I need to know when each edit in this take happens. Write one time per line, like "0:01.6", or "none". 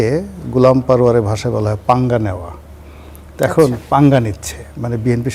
none